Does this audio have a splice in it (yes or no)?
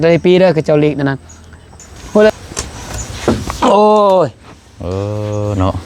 yes